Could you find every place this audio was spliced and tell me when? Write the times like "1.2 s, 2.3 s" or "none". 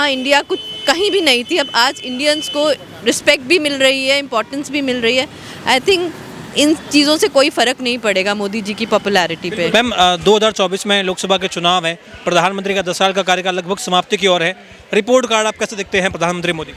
none